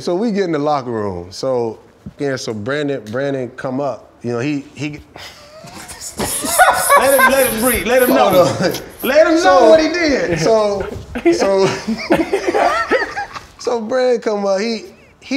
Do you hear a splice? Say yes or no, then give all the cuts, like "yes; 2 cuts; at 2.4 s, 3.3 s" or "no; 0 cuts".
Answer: yes; 1 cut; at 2.1 s